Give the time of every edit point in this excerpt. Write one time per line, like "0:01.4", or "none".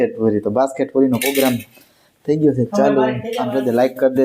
0:03.2